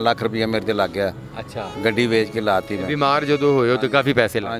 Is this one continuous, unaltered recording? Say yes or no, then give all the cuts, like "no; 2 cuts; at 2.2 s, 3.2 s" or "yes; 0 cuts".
yes; 0 cuts